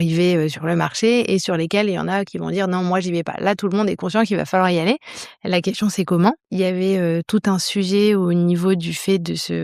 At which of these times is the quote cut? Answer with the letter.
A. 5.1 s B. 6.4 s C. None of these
B